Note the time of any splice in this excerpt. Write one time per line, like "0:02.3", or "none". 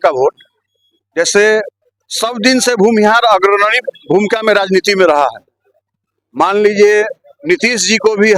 none